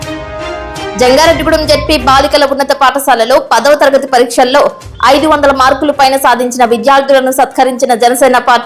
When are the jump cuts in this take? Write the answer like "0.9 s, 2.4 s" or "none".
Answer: none